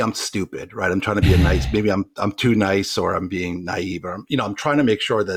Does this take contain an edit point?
no; 0 cuts

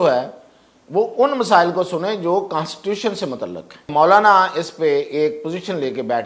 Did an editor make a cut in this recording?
yes; 1 cut; at 3.8 s

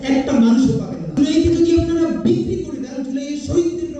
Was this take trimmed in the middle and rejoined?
yes; 1 cut; at 1.1 s

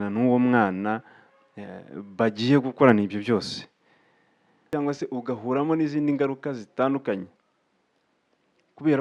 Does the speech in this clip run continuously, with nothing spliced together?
no; 1 cut; at 4.7 s

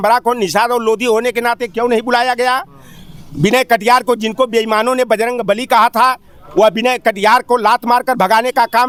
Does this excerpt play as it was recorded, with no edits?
yes; 0 cuts

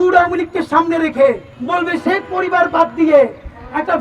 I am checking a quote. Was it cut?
yes; 1 cut; at 1.5 s

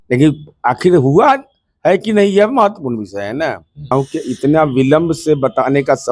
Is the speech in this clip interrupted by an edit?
yes; 1 cut; at 3.9 s

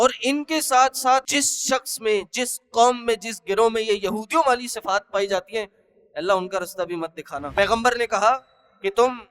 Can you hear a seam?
yes; 2 cuts; at 1.3 s, 7.5 s

